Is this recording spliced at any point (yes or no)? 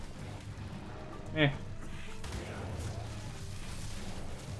no